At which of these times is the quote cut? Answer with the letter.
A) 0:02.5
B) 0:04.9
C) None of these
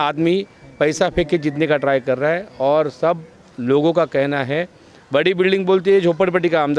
C